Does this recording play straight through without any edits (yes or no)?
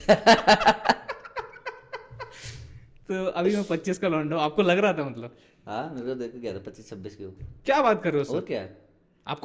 yes